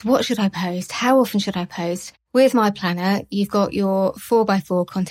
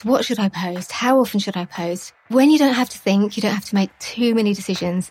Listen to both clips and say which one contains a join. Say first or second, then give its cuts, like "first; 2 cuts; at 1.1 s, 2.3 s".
second; 1 cut; at 2.3 s